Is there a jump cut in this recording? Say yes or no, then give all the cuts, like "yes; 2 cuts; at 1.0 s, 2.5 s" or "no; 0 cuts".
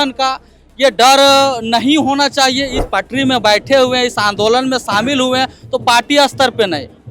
yes; 1 cut; at 2.8 s